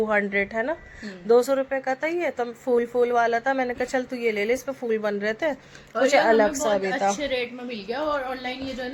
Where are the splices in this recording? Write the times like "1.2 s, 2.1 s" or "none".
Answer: none